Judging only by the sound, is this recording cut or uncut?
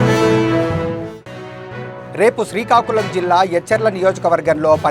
uncut